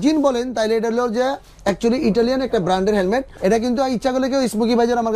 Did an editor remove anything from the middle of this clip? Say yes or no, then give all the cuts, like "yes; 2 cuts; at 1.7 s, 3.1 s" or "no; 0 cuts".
yes; 1 cut; at 3.3 s